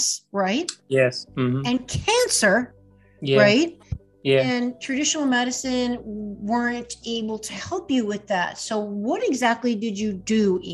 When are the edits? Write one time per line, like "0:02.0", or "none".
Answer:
none